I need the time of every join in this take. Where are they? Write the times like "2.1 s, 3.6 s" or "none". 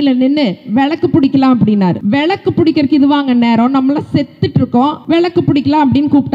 2.0 s, 5.0 s

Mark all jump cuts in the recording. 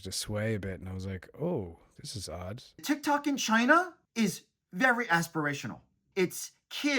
2.8 s, 4.0 s, 6.1 s

